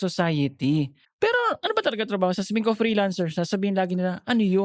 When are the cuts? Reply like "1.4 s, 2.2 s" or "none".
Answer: 1.0 s